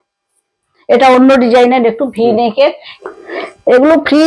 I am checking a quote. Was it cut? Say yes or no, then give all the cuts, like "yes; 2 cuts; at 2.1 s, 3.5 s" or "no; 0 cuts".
yes; 1 cut; at 2.9 s